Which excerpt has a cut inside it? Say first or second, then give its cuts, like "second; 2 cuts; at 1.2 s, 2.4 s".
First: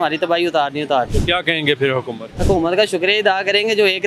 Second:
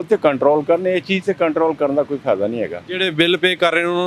first; 2 cuts; at 1.1 s, 2.2 s